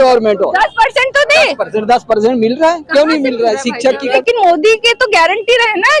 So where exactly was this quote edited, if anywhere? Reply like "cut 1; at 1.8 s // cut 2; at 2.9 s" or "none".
cut 1; at 4.2 s

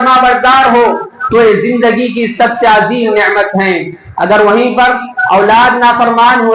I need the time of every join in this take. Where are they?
cut 1; at 4.0 s

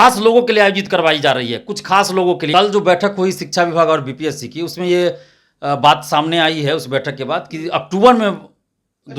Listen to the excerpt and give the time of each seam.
cut 1; at 2.5 s

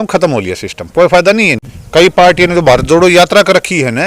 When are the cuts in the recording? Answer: cut 1; at 1.6 s

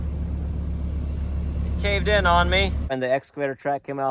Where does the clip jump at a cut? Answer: cut 1; at 2.9 s

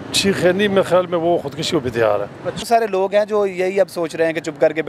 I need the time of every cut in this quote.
cut 1; at 2.6 s

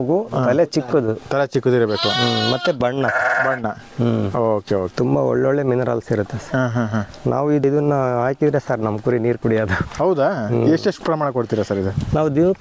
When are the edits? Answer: cut 1; at 4.9 s // cut 2; at 7.6 s

